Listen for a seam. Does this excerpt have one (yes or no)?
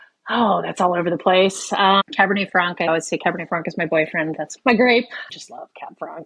yes